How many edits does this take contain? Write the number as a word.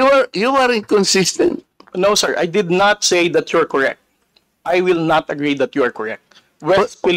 zero